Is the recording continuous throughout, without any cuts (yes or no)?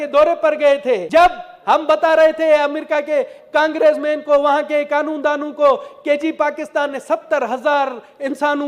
no